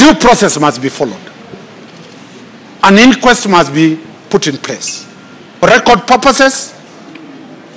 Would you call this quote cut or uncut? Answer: cut